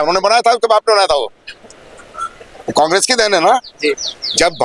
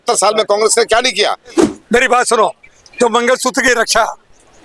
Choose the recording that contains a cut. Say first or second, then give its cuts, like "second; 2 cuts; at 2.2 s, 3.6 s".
second; 1 cut; at 1.7 s